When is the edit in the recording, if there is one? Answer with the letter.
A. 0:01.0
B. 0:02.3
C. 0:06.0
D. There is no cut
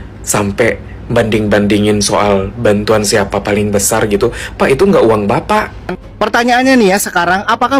C